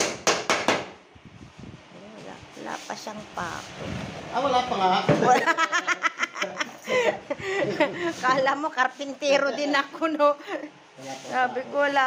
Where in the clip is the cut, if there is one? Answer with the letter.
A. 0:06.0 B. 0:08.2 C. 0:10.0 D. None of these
D